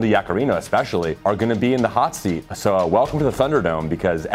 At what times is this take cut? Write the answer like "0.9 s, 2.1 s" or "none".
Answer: 1.1 s, 2.5 s